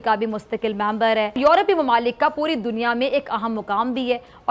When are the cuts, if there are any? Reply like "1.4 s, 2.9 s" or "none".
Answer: 1.4 s